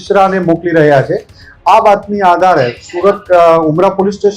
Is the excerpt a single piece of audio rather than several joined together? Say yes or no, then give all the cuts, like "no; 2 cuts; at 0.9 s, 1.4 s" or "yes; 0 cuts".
yes; 0 cuts